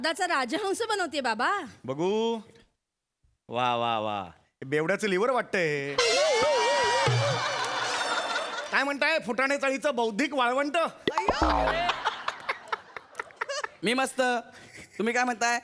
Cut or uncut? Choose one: cut